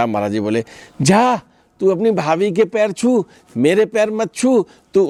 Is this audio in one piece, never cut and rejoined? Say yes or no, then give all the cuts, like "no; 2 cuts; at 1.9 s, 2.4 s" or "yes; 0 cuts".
yes; 0 cuts